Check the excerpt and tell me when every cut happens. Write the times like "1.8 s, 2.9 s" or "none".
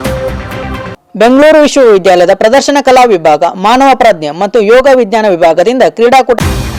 none